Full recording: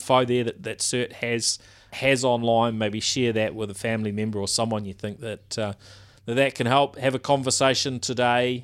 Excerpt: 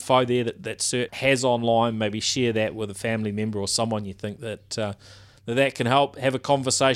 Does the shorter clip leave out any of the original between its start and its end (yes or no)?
yes